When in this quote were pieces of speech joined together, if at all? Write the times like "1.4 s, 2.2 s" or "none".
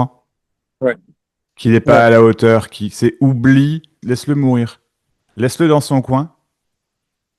4.0 s

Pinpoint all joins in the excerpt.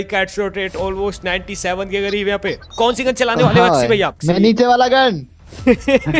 2.7 s, 4.2 s

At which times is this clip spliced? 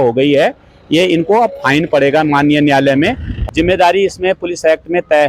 3.3 s

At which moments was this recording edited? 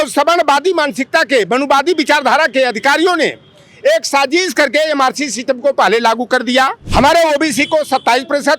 6.8 s

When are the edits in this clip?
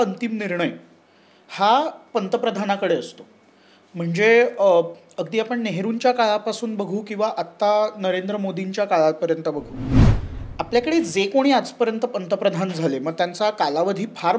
none

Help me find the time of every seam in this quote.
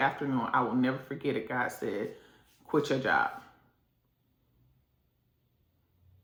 none

